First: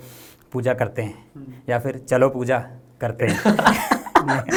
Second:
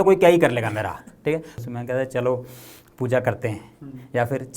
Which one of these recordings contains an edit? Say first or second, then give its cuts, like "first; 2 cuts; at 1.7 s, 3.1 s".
second; 1 cut; at 1.5 s